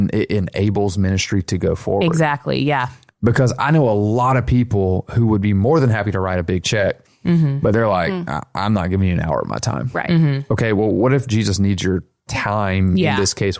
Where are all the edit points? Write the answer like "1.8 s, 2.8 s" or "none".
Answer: none